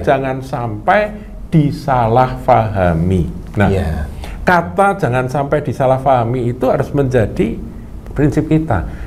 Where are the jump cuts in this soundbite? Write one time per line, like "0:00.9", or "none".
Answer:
0:07.9